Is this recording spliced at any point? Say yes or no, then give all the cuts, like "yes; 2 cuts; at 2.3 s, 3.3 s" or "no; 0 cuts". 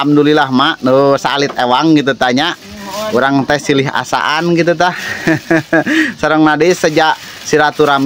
no; 0 cuts